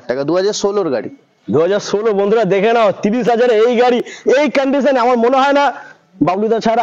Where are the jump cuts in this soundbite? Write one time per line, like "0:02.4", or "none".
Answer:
none